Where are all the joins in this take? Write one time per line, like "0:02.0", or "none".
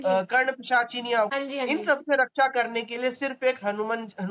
0:01.3

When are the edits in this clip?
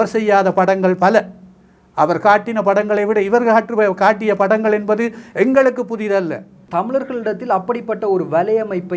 0:06.6

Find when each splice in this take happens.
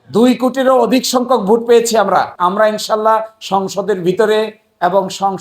0:02.3

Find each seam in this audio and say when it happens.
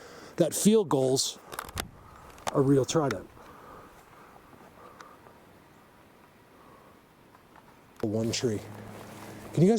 0:08.0

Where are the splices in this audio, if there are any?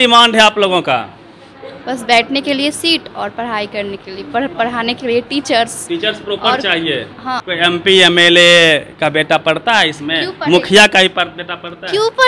0:07.4

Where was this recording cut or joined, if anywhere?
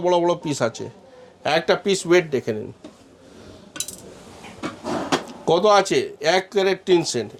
none

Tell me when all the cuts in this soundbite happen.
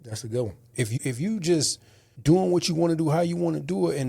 0:00.9

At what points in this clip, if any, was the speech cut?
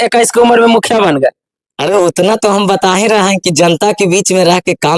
none

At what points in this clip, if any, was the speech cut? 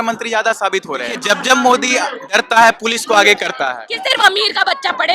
0:01.1
0:03.9

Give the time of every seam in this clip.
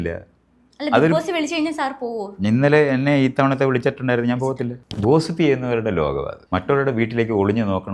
0:04.8
0:06.4

